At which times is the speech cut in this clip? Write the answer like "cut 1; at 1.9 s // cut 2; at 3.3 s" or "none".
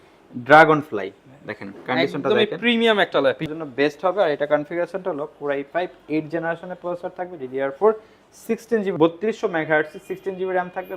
cut 1; at 3.4 s // cut 2; at 8.9 s